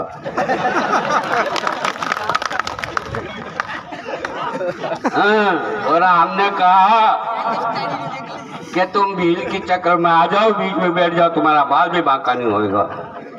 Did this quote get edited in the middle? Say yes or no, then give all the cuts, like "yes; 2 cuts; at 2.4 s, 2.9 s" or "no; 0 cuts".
no; 0 cuts